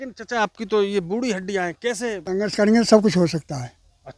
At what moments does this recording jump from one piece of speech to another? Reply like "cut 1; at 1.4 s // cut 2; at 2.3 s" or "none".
cut 1; at 2.2 s